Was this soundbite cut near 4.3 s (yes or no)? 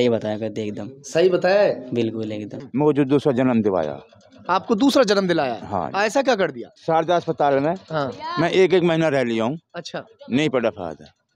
no